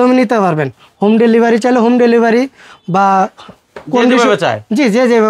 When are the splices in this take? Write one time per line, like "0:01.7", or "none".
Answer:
none